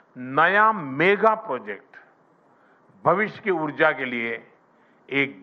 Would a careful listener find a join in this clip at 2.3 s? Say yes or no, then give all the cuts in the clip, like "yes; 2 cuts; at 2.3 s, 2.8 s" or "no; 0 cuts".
no; 1 cut; at 3.6 s